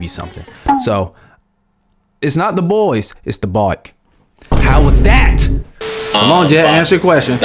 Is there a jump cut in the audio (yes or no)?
yes